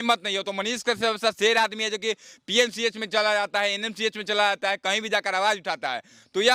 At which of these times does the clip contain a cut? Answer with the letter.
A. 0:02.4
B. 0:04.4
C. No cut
C